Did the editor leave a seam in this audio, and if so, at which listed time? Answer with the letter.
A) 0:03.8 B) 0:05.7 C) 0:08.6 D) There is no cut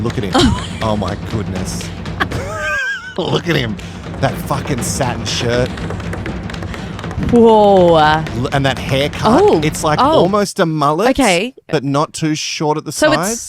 D